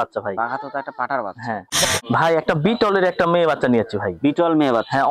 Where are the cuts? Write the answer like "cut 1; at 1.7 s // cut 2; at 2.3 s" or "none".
cut 1; at 2.0 s